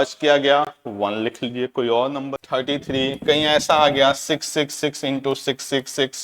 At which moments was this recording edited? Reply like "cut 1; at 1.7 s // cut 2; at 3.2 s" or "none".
cut 1; at 2.3 s